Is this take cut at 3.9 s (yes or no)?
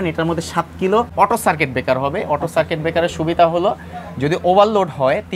no